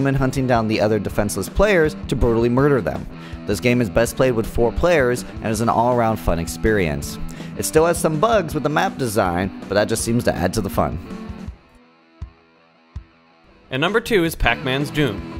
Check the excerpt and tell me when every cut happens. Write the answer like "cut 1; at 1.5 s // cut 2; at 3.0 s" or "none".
cut 1; at 7.8 s